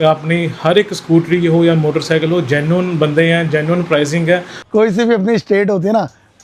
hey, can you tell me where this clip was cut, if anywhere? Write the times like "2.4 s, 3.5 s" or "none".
4.6 s

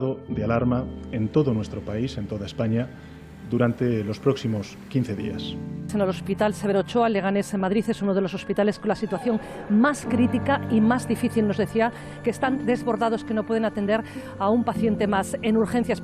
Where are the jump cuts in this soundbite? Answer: 5.8 s, 12.6 s

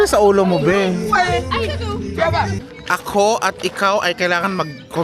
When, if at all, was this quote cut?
2.6 s

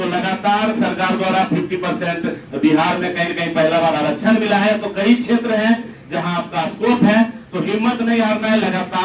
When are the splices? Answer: none

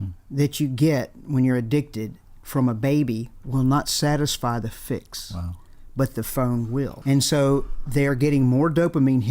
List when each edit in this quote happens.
7.0 s

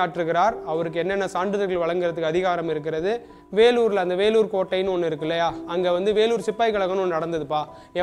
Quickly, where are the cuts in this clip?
3.3 s

